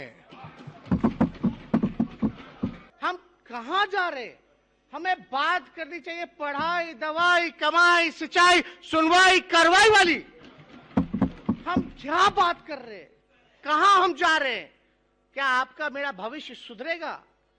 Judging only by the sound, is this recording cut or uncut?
cut